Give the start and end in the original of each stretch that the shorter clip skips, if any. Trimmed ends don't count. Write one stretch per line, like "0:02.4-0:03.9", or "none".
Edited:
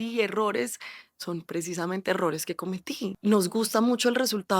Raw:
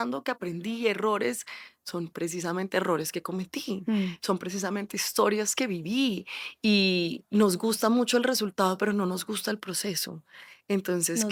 0:03.8-0:07.2